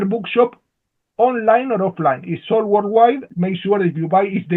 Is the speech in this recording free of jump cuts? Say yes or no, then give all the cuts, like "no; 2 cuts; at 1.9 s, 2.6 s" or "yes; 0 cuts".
no; 1 cut; at 3.2 s